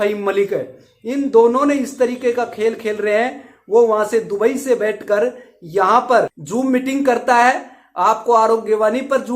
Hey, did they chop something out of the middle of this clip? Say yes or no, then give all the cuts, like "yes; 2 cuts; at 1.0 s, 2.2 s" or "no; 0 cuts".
yes; 1 cut; at 6.4 s